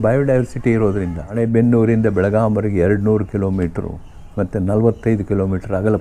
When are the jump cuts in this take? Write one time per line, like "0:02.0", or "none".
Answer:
0:01.4